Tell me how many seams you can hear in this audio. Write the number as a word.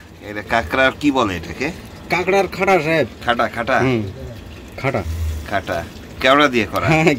zero